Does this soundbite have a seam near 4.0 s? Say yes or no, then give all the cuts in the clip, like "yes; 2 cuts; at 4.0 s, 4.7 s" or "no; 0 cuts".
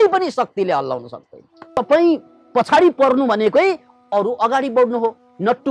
no; 1 cut; at 1.5 s